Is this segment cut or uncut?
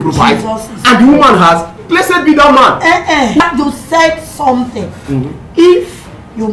cut